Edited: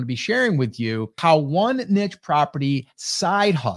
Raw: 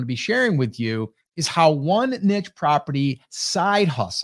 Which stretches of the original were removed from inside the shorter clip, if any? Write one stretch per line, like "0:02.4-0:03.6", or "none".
0:01.1-0:01.4